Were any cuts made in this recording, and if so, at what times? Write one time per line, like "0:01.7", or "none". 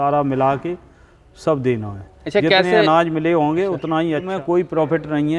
0:04.3